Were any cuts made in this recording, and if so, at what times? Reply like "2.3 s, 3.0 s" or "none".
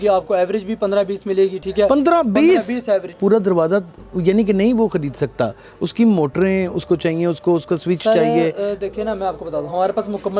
3.1 s